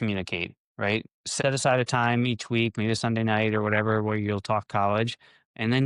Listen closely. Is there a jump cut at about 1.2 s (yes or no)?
yes